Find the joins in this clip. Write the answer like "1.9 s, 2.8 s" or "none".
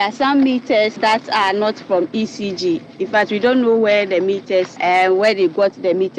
0.9 s, 4.7 s